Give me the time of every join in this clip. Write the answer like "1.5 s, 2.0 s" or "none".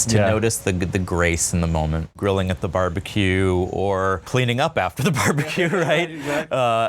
2.1 s, 4.2 s